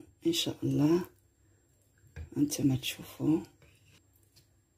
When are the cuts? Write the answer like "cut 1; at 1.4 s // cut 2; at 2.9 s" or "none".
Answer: cut 1; at 3.9 s